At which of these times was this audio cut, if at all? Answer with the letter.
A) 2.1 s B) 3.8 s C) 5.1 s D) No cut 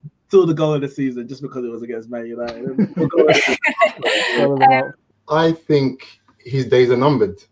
C